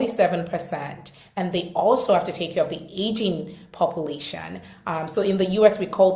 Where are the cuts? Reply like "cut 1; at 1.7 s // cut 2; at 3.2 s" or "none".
none

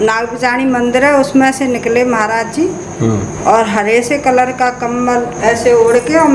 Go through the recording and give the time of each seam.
none

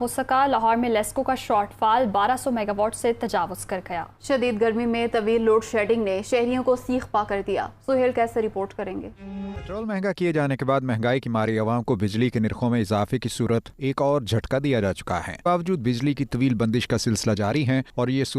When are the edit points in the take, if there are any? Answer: none

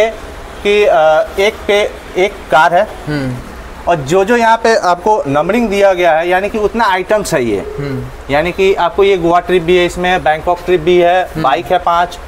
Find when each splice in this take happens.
none

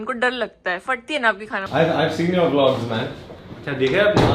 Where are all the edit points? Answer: cut 1; at 1.6 s

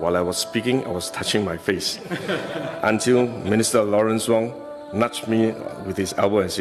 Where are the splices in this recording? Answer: none

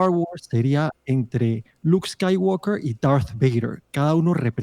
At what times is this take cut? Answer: none

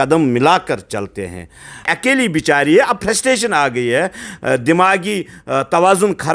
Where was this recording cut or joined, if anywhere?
cut 1; at 1.9 s

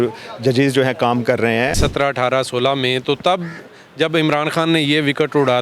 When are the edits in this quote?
cut 1; at 1.7 s

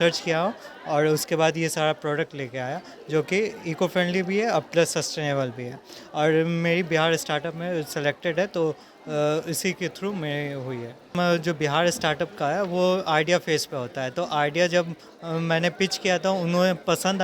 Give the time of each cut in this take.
cut 1; at 11.1 s

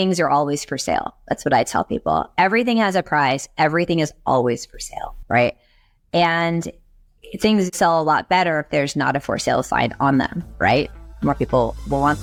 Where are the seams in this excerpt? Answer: none

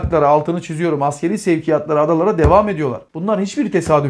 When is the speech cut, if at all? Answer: cut 1; at 3.1 s

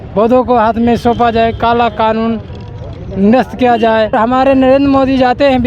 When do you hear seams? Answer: cut 1; at 4.1 s

